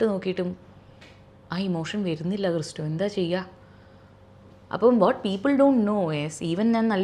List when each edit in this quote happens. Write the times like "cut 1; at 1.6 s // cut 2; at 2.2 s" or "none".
none